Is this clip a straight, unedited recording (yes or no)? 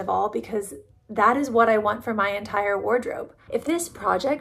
no